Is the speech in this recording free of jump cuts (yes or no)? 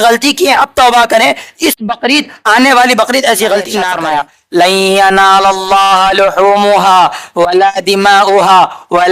no